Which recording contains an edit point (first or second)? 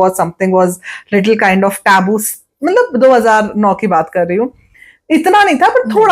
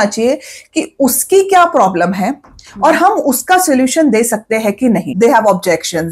second